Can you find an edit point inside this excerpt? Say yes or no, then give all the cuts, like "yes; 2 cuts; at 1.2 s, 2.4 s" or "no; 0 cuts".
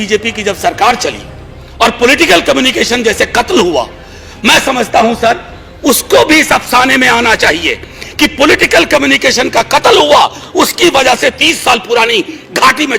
no; 0 cuts